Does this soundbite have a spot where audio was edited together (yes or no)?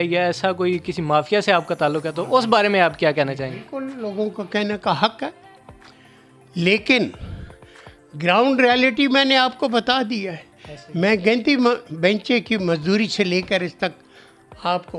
no